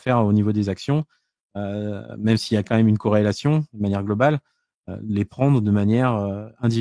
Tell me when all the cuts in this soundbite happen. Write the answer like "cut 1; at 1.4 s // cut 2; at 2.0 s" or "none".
none